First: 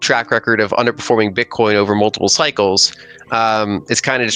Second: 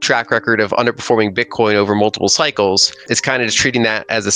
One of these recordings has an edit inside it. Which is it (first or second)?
second